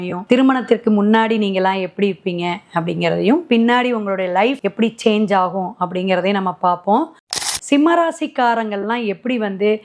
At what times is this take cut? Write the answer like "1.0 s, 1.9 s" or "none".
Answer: 7.3 s

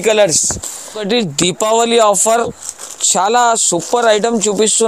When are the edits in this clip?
1.0 s

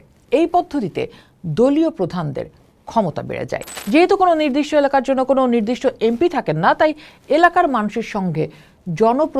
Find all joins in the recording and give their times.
3.7 s

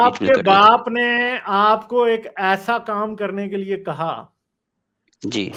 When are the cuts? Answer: none

